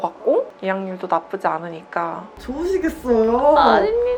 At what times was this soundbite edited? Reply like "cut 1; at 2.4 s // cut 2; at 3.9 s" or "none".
none